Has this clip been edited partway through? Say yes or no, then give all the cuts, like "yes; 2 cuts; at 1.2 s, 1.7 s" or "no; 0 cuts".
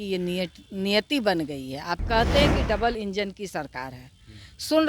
yes; 1 cut; at 2.0 s